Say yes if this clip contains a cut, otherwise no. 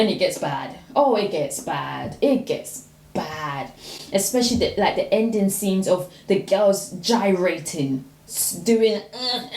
no